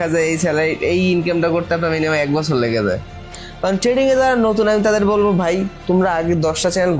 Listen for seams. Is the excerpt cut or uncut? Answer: cut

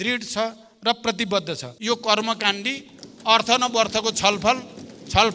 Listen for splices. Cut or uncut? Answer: cut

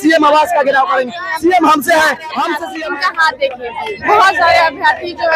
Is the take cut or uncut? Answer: cut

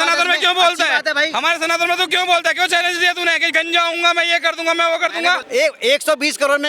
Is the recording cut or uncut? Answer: cut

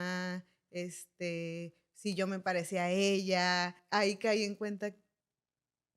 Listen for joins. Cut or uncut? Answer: cut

